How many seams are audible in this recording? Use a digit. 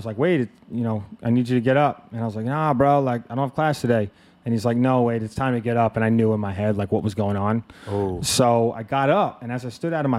0